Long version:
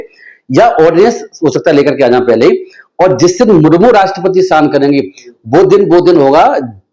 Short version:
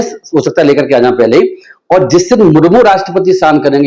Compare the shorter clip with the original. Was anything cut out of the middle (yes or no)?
no